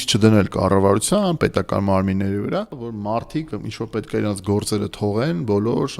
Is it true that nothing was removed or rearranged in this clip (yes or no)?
no